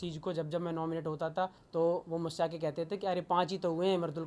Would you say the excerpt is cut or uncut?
cut